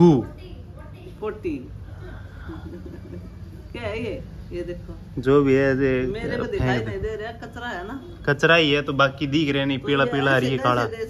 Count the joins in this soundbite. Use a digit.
0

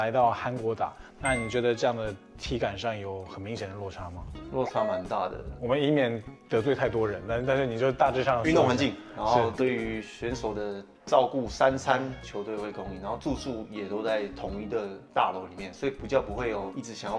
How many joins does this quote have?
0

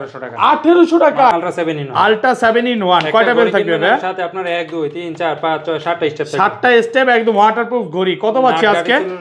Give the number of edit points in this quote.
1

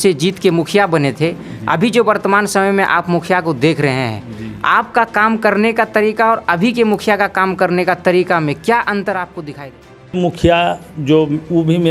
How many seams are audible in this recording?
1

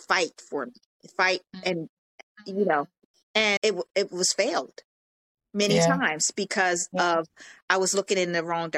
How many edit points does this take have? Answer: 0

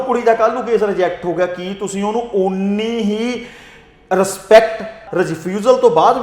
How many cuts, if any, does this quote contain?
1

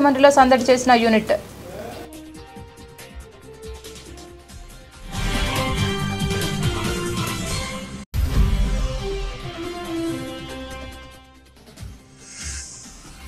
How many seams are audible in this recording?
0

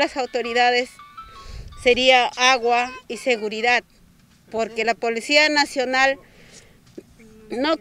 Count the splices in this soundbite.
0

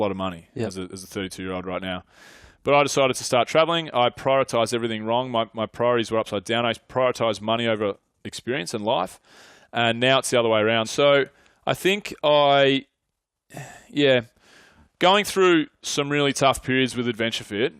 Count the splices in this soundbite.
1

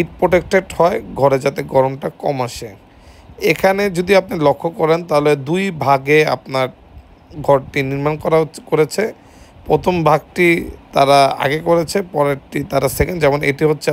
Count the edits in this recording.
0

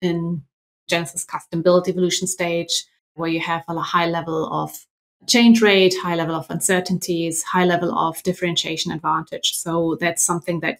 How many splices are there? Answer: 1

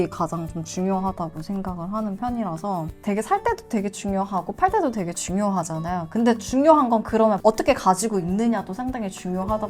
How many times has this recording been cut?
2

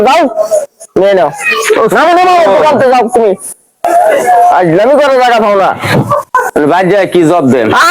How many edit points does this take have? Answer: 1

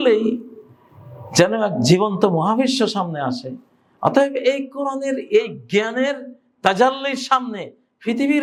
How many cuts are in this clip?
0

